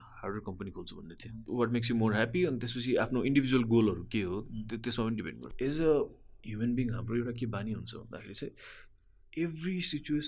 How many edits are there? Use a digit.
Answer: 2